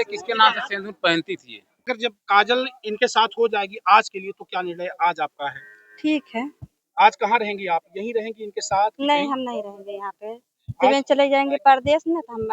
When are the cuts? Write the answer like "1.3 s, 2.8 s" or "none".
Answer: 1.8 s